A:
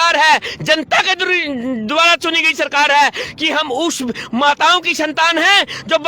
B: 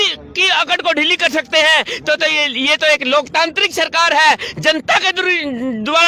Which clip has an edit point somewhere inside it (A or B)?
A